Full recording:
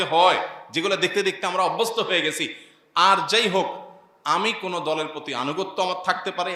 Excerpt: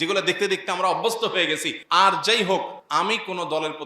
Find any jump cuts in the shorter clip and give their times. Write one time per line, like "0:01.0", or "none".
0:01.7
0:02.8